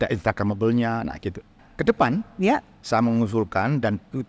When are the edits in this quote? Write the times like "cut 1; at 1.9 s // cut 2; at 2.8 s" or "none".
cut 1; at 1.6 s